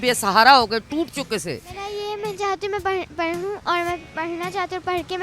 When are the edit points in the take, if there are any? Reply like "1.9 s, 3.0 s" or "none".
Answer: 1.8 s